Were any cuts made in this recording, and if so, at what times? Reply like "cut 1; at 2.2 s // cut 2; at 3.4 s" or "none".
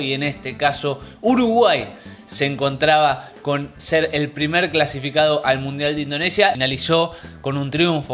cut 1; at 6.6 s